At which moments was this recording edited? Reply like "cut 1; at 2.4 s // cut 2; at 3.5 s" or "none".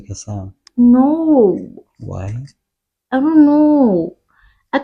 none